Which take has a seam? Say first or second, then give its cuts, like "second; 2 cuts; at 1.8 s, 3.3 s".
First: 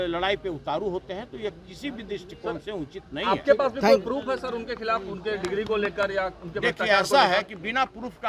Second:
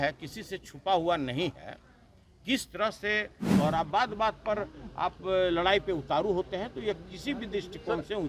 second; 1 cut; at 3.5 s